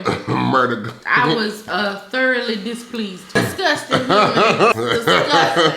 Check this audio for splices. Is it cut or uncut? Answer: cut